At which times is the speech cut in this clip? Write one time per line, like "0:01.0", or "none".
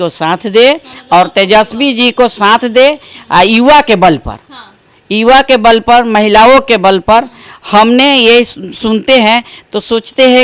none